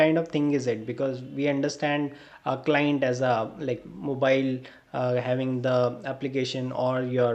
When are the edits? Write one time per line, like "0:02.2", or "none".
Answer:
none